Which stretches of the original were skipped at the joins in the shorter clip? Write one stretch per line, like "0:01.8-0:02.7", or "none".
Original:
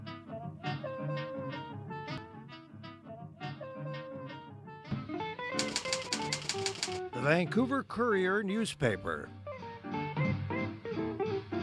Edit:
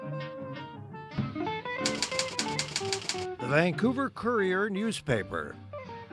0:01.9-0:04.7